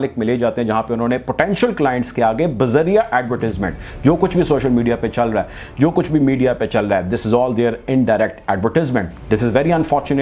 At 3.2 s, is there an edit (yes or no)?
no